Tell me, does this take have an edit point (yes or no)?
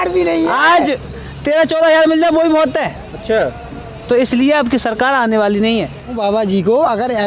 yes